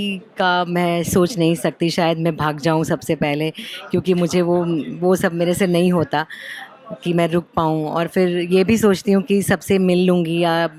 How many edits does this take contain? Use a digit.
0